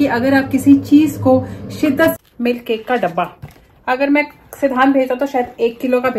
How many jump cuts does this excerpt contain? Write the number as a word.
one